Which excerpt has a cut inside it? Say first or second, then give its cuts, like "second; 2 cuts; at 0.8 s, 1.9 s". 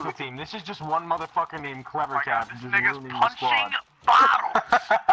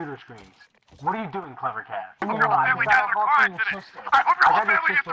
second; 1 cut; at 2.2 s